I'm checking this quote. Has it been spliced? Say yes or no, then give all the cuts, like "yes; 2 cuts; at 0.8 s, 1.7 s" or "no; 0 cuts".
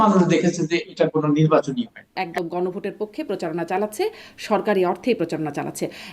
yes; 1 cut; at 2.2 s